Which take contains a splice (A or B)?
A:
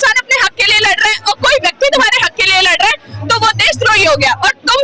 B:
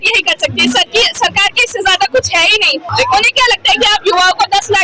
B